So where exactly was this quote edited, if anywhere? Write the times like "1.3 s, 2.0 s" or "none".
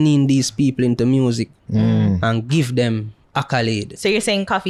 none